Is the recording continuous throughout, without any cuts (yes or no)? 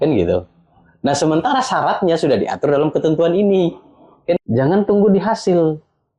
no